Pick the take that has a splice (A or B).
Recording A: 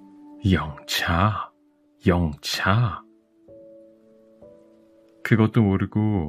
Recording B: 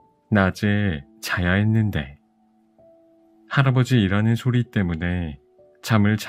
A